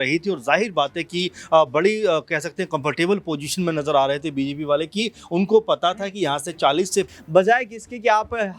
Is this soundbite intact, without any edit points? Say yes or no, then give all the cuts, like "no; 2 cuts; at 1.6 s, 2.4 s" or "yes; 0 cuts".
no; 1 cut; at 7.1 s